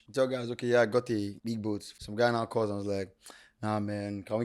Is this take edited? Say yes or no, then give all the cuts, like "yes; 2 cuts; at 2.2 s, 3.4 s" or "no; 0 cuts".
yes; 1 cut; at 1.6 s